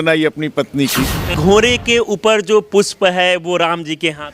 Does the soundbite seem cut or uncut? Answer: cut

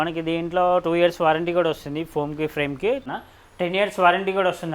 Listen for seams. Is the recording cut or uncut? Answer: cut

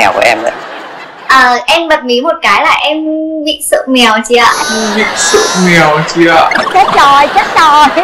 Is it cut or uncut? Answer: uncut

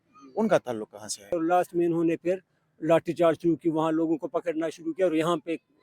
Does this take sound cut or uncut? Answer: cut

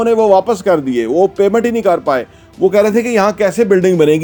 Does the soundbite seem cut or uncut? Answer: uncut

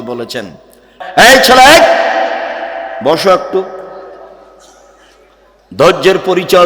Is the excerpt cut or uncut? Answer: cut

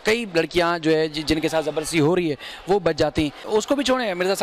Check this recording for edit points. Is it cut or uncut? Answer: cut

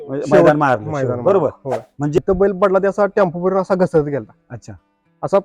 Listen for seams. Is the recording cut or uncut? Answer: cut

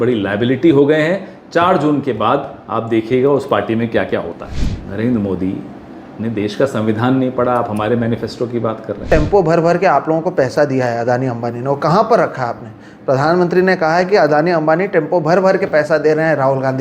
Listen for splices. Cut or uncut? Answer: cut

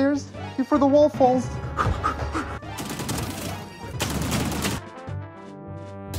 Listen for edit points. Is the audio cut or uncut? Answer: cut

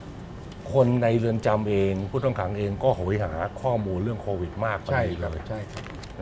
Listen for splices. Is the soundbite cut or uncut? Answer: uncut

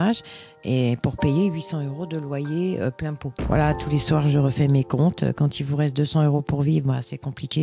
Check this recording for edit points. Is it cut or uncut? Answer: cut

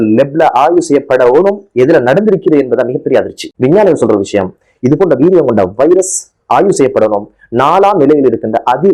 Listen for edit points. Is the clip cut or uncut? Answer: uncut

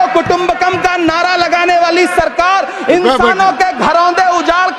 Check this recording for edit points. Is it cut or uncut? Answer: uncut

